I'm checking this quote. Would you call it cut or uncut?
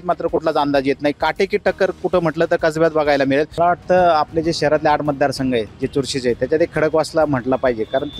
cut